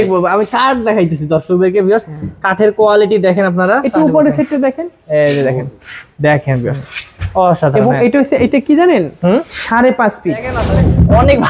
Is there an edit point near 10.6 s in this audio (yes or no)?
yes